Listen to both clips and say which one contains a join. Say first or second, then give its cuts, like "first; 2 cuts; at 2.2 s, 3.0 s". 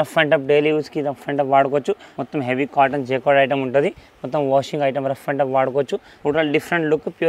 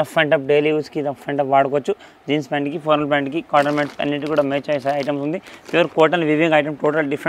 first; 2 cuts; at 2.1 s, 6.1 s